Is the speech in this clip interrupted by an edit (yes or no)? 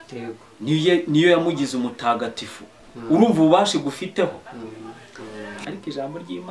yes